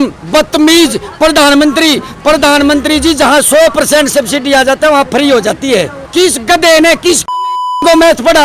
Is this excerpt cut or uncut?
cut